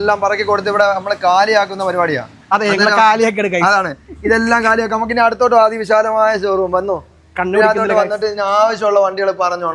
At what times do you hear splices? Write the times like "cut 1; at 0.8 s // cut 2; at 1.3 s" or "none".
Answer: none

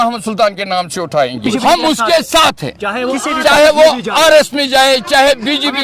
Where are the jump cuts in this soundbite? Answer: cut 1; at 1.4 s

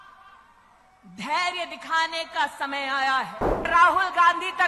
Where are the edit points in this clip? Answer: cut 1; at 3.7 s

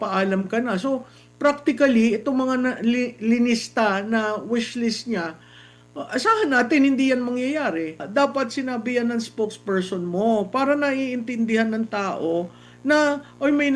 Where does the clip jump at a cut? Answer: cut 1; at 8.0 s

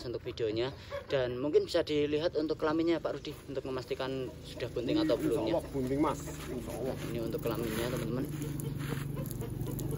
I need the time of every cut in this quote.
none

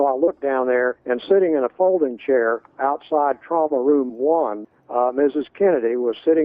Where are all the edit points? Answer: cut 1; at 1.0 s // cut 2; at 2.7 s // cut 3; at 4.6 s

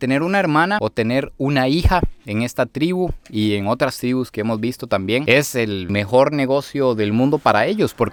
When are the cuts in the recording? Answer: none

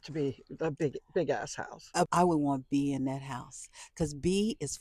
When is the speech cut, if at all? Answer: cut 1; at 2.1 s

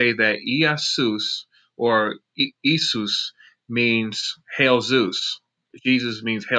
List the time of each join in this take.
cut 1; at 1.1 s

